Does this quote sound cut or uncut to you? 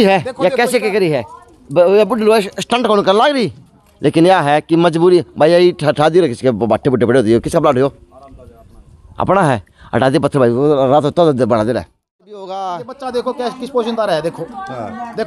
cut